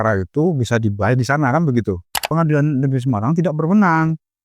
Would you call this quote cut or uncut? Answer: cut